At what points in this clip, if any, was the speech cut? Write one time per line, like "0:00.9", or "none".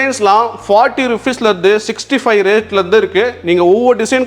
none